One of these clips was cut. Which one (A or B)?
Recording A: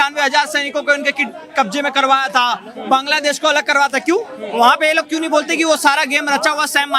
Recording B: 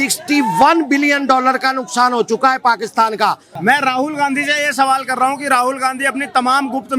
B